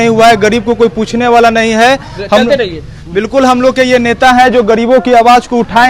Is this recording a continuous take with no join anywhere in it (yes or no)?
yes